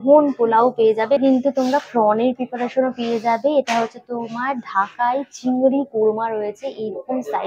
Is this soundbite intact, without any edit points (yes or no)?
yes